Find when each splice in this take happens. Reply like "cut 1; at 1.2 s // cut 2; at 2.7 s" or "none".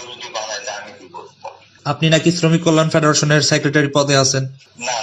cut 1; at 1.7 s